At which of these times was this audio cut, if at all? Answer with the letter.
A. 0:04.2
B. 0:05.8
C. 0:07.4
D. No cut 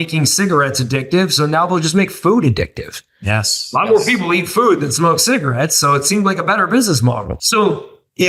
C